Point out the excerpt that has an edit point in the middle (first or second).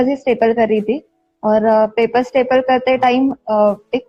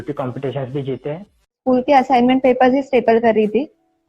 second